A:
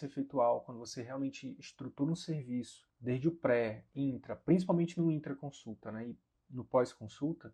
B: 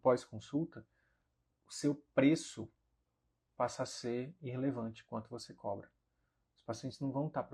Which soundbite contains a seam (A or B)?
A